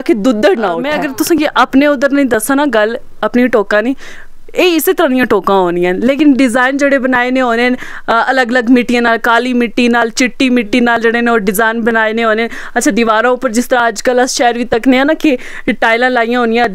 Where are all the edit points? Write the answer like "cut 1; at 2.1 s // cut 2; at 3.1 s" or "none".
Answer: cut 1; at 1.0 s